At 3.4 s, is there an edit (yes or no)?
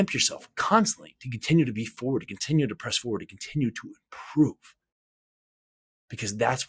no